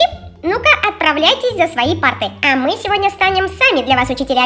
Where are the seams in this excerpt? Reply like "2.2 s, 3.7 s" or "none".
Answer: none